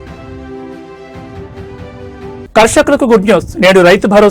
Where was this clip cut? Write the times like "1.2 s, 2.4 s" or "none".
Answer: 2.4 s